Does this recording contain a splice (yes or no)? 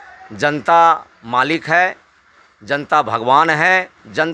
no